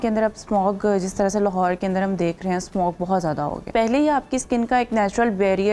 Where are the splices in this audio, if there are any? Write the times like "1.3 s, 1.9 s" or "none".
3.7 s